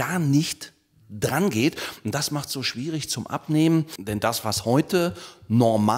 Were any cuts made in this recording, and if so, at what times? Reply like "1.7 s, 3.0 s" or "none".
4.0 s